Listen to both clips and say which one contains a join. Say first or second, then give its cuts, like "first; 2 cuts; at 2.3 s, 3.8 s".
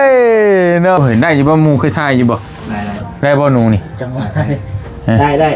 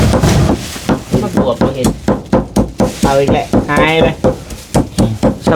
first; 1 cut; at 1.0 s